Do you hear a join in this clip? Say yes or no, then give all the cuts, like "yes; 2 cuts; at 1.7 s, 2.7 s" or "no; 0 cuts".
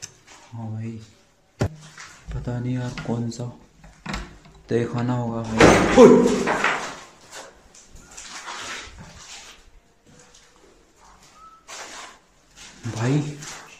yes; 1 cut; at 1.7 s